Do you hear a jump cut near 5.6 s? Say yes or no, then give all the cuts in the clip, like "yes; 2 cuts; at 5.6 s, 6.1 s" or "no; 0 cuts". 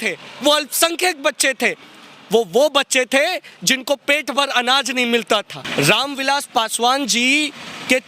yes; 1 cut; at 5.6 s